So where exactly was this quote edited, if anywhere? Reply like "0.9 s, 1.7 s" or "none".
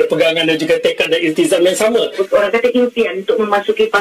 2.2 s